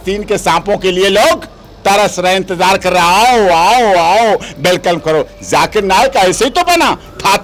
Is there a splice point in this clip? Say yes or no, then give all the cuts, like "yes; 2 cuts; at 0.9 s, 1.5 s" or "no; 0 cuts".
no; 0 cuts